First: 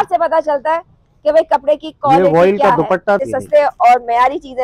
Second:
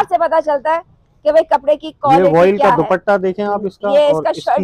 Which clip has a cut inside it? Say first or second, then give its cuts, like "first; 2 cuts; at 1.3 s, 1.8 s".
first; 1 cut; at 3.2 s